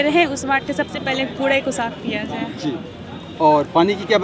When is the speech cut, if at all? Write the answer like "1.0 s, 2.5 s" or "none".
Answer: none